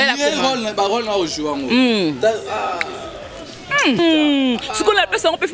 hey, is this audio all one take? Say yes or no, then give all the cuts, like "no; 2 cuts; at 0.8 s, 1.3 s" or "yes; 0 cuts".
no; 1 cut; at 4.0 s